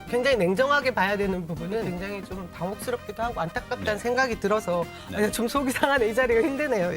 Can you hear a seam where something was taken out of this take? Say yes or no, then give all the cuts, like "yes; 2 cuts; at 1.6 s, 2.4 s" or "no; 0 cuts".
yes; 1 cut; at 1.9 s